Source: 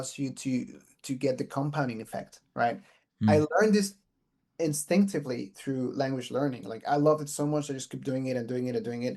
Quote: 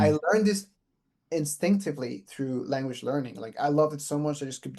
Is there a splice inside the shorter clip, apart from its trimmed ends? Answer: no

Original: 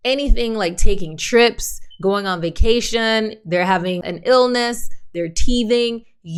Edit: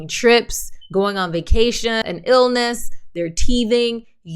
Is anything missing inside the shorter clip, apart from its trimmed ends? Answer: yes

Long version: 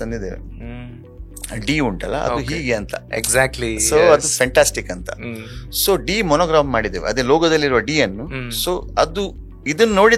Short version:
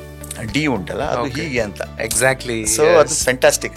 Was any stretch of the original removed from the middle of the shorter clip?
no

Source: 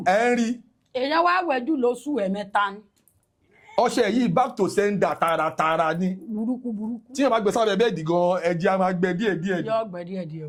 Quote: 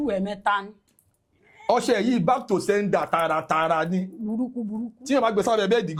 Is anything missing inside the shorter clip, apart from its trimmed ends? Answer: no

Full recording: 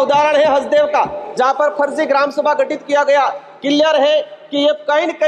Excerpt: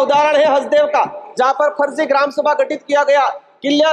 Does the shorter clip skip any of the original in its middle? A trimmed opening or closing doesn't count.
no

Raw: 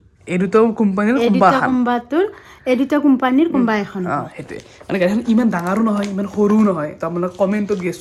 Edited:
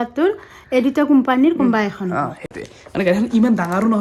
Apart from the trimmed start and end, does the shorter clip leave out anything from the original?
no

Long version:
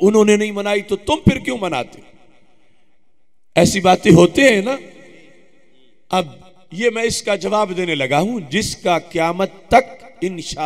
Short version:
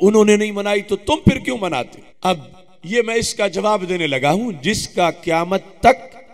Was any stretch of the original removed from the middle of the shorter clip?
yes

